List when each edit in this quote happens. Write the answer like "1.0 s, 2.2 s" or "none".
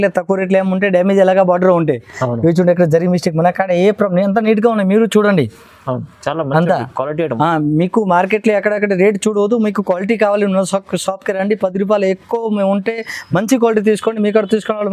none